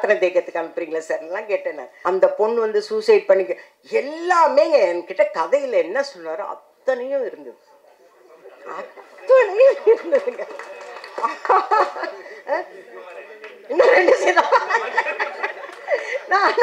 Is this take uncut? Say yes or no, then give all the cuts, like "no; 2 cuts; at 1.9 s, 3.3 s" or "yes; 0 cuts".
no; 1 cut; at 1.9 s